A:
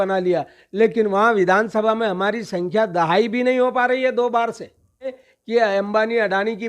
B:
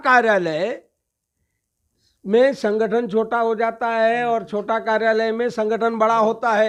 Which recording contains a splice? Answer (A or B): A